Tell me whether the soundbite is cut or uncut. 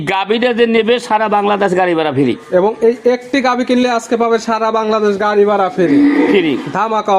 uncut